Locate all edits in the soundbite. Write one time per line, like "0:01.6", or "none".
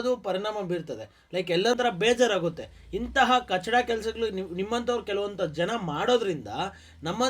0:01.7